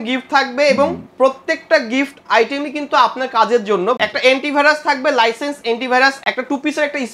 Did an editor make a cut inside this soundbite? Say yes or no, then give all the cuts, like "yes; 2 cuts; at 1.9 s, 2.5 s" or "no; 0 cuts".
yes; 2 cuts; at 4.0 s, 6.2 s